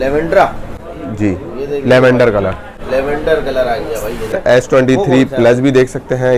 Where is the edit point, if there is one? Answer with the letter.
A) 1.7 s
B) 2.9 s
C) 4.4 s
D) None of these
C